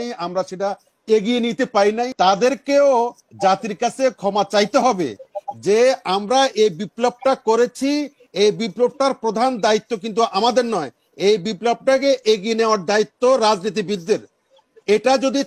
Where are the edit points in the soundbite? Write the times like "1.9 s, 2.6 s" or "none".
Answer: 2.1 s

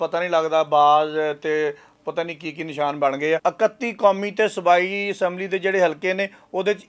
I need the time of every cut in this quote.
3.4 s

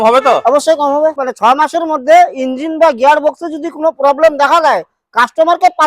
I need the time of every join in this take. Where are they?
1.2 s

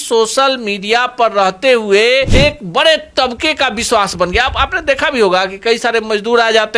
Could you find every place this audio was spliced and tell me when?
2.3 s

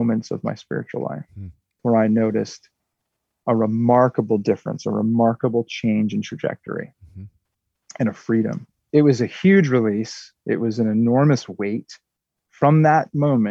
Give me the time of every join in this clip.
1.7 s, 8.7 s

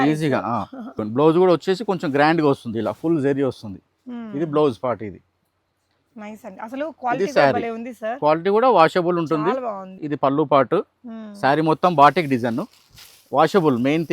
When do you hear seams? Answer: 1.0 s, 9.9 s

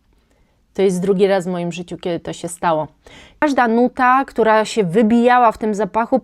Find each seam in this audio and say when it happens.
3.4 s

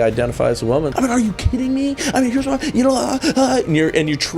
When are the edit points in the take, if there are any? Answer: 0.9 s

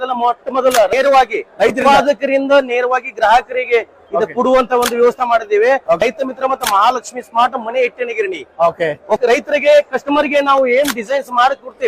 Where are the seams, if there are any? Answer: 0.9 s, 6.0 s, 9.2 s

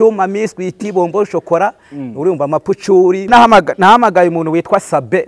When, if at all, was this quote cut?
3.3 s

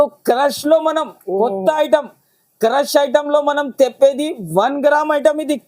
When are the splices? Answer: none

